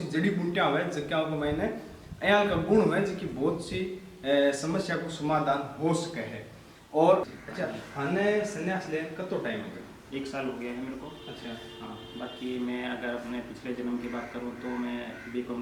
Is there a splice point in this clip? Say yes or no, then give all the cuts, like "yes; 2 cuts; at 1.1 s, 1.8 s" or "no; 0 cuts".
yes; 1 cut; at 7.4 s